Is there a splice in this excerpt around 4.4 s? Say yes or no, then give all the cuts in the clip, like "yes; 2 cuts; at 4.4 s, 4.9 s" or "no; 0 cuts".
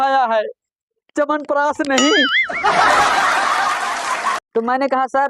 yes; 1 cut; at 4.4 s